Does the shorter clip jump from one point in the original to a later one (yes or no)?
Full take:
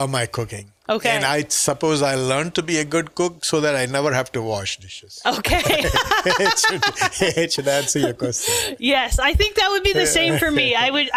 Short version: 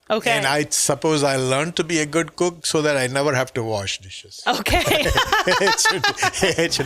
no